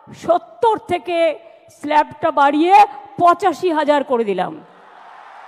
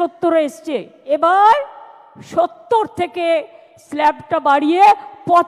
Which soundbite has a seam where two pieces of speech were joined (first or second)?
second